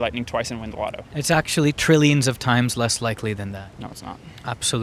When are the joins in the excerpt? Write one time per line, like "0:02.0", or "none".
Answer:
0:01.1
0:03.7